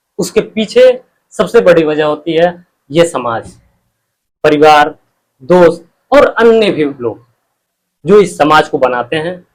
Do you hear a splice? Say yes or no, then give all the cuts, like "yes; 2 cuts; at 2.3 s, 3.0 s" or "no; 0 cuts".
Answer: no; 0 cuts